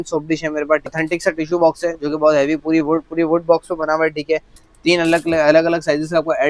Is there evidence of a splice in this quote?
yes; 2 cuts; at 0.9 s, 4.6 s

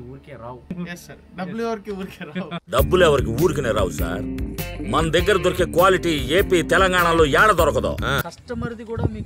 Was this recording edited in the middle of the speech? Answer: yes; 2 cuts; at 0.7 s, 8.2 s

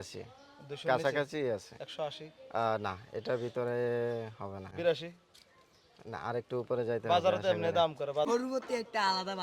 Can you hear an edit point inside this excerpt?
yes; 2 cuts; at 4.7 s, 8.3 s

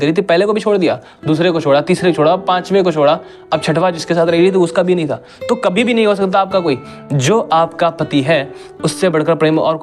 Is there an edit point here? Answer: no; 0 cuts

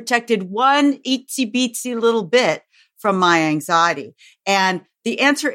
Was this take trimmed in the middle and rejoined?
no; 0 cuts

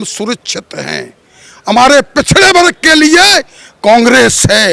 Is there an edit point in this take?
no; 0 cuts

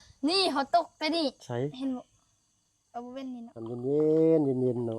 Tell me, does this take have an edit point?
yes; 1 cut; at 3.5 s

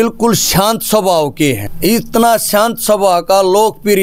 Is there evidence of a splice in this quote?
yes; 1 cut; at 1.7 s

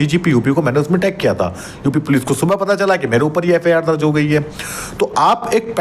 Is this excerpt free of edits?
yes; 0 cuts

